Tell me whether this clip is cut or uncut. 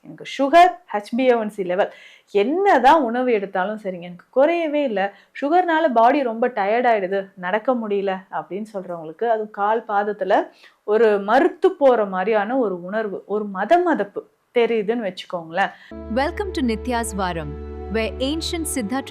cut